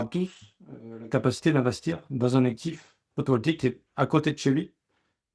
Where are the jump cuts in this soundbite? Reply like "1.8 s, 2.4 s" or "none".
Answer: none

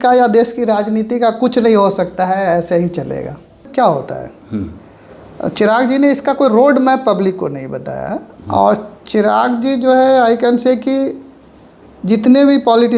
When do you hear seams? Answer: 3.7 s

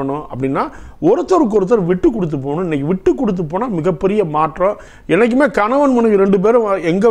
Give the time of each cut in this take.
4.9 s

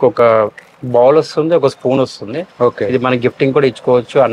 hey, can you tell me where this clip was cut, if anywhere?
none

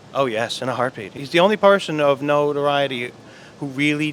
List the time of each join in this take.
1.2 s

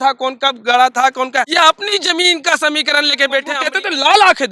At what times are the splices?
1.5 s, 3.6 s

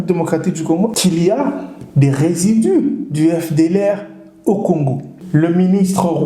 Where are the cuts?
0.9 s, 5.1 s

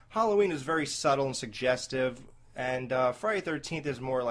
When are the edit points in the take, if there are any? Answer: none

